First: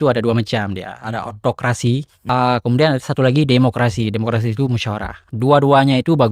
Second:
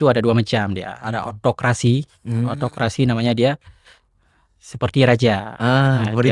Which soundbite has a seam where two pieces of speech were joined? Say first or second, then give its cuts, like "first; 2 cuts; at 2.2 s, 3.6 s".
first; 1 cut; at 2.1 s